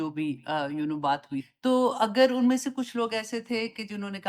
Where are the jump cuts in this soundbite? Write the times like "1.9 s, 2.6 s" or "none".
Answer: none